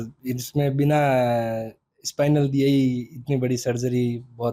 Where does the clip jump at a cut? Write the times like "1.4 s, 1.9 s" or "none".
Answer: none